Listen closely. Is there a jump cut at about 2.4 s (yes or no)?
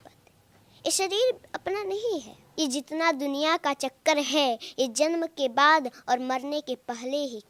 yes